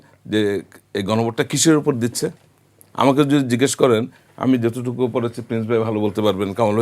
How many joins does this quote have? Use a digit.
0